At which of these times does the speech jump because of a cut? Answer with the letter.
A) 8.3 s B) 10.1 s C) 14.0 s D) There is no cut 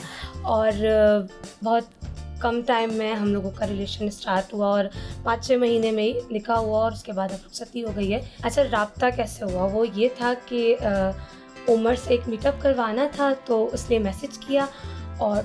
A